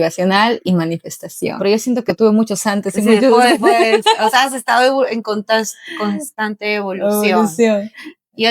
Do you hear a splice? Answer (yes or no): yes